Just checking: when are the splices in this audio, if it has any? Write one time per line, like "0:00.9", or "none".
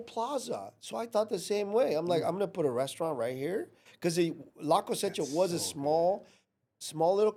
none

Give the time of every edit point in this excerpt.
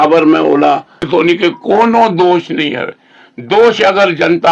0:01.0

